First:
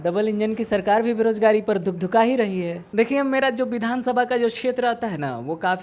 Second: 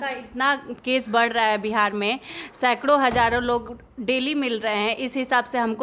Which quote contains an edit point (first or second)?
first